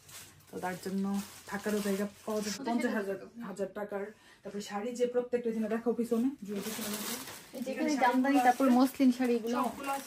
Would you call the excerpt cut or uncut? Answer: cut